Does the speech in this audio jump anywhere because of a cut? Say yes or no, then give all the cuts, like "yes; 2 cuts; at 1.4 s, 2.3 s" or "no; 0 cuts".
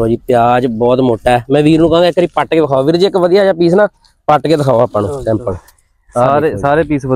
no; 0 cuts